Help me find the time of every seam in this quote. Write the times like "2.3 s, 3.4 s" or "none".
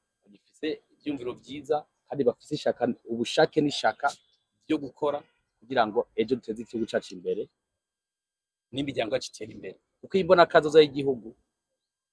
none

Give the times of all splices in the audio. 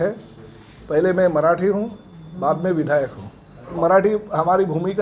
3.8 s

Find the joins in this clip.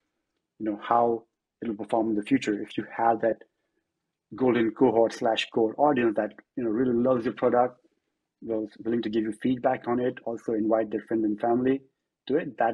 none

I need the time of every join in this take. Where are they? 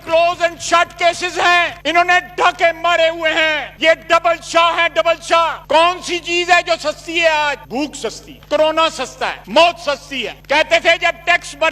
5.6 s, 10.4 s

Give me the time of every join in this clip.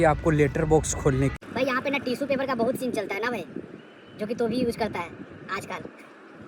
1.4 s

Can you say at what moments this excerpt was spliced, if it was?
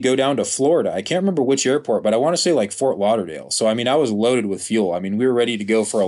none

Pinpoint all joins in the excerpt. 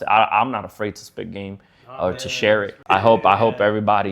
2.8 s

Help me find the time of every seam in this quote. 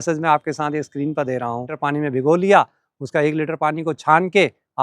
1.8 s

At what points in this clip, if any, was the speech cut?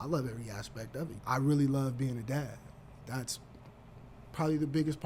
1.1 s, 3.0 s

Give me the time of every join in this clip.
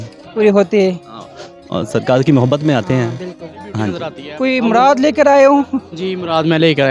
4.2 s

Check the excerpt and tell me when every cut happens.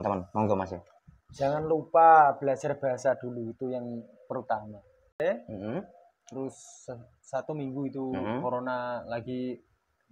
5.1 s

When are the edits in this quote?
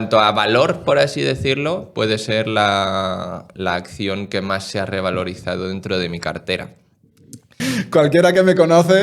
7.6 s

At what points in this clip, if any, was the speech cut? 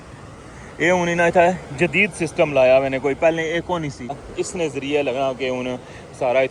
4.2 s

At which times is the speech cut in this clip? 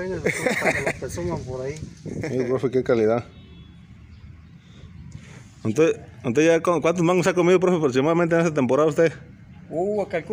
2.2 s

